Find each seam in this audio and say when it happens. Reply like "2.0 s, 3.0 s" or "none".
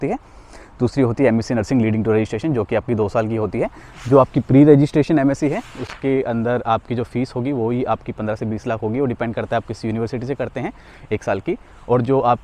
none